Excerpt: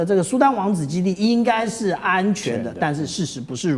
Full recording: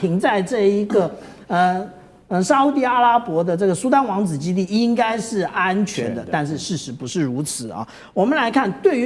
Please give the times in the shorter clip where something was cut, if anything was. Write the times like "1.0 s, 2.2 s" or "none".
none